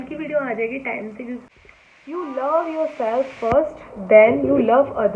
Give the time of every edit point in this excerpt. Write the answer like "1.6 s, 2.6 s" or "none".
1.4 s